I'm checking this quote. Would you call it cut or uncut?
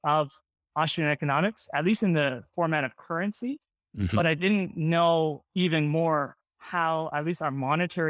uncut